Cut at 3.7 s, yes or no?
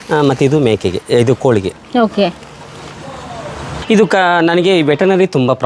yes